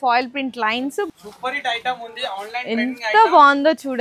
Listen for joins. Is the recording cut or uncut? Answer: cut